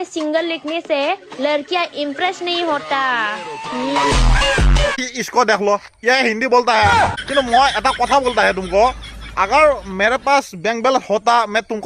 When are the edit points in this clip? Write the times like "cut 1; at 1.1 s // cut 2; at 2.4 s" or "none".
cut 1; at 5.0 s // cut 2; at 7.2 s